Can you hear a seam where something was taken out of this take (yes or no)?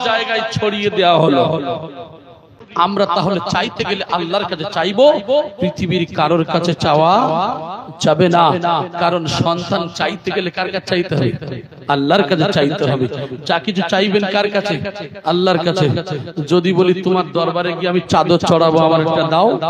yes